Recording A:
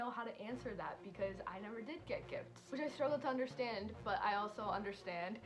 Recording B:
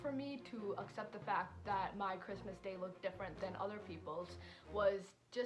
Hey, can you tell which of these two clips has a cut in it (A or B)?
A